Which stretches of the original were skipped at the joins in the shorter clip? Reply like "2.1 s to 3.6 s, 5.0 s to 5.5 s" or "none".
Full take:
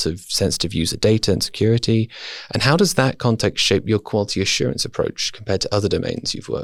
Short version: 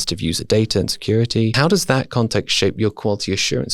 2.1 s to 2.6 s